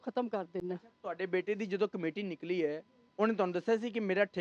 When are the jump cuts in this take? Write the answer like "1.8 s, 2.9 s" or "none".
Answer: none